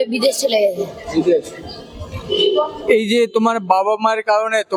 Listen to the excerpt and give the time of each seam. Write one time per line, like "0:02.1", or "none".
none